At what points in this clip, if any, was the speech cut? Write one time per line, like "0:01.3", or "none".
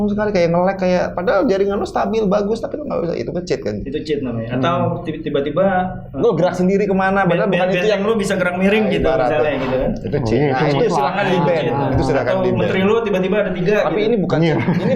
none